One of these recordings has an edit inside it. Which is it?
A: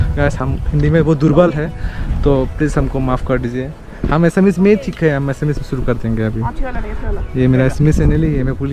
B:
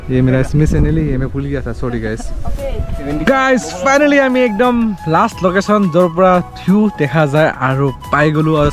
B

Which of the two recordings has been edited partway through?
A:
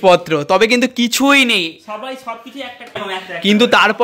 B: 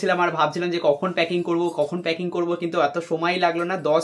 A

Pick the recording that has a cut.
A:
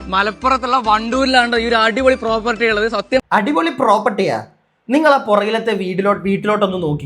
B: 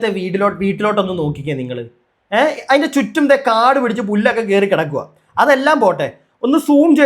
A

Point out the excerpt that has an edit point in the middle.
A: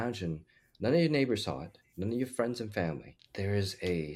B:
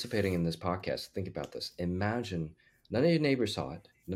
A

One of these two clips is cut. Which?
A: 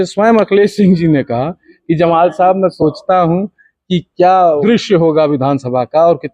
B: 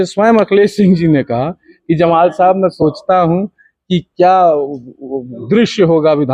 A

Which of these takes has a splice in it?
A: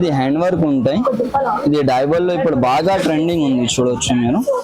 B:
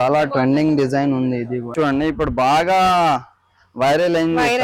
B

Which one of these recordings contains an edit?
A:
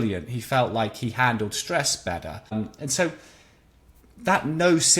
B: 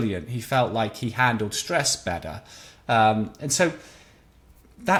A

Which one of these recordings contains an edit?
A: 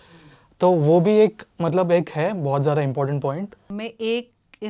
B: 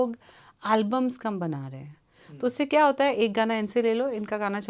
A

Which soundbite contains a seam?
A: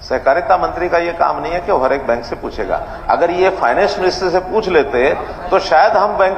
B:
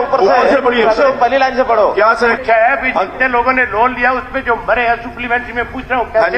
B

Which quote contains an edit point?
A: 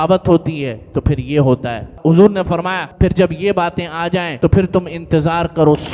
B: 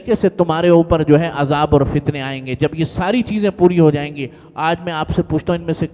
A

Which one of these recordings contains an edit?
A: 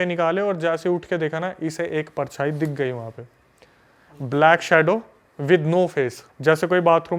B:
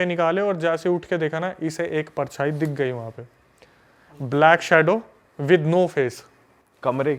A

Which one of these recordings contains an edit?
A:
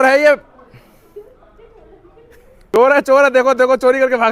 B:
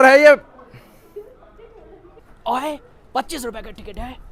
B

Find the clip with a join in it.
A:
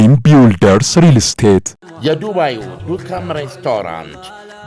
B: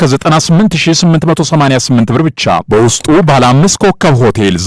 A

